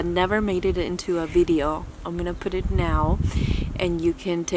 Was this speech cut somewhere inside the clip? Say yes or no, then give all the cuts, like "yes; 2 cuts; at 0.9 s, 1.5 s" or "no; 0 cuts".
no; 0 cuts